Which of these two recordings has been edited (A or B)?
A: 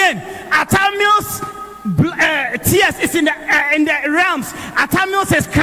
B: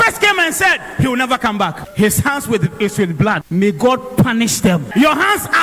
B